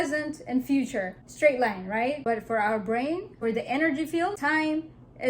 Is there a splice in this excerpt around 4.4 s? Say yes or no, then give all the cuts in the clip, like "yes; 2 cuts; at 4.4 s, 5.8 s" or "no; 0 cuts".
yes; 4 cuts; at 1.2 s, 2.2 s, 3.3 s, 4.4 s